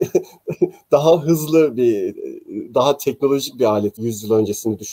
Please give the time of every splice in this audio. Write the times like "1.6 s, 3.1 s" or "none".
4.0 s